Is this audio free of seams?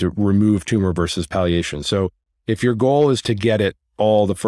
no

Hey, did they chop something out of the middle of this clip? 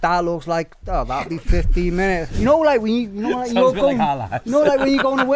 yes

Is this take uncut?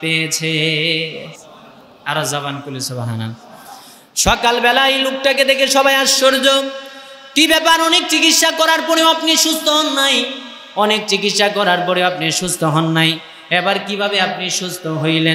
yes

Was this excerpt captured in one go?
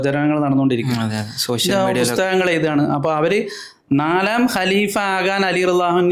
yes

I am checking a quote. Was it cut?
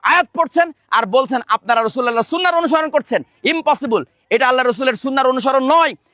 no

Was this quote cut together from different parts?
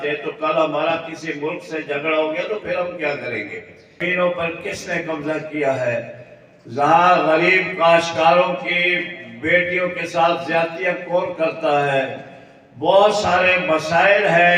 yes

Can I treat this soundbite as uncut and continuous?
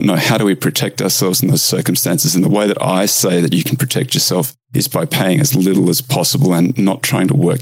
yes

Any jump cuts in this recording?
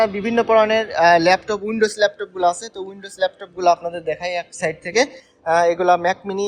yes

